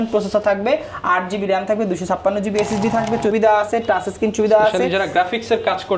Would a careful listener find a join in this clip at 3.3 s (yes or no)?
yes